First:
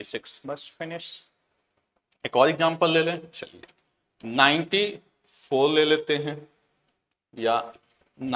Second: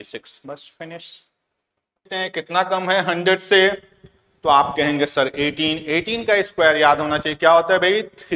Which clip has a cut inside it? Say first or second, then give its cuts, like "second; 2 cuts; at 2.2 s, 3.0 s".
second; 1 cut; at 2.1 s